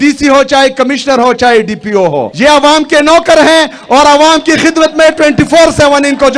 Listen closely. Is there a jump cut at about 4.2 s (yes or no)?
no